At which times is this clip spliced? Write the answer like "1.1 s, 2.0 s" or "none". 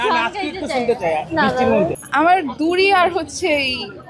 2.0 s